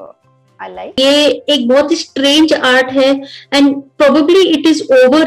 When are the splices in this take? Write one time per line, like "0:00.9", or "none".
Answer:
0:01.0